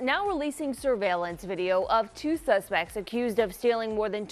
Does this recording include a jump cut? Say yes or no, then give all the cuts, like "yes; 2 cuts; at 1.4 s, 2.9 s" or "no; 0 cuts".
no; 0 cuts